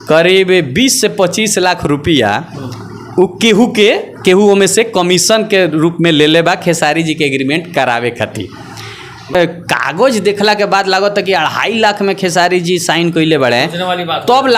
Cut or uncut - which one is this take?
cut